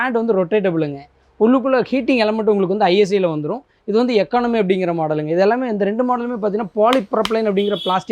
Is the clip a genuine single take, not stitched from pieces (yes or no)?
yes